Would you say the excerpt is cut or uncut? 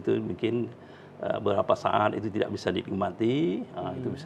uncut